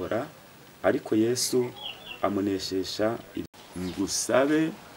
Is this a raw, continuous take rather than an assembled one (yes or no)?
no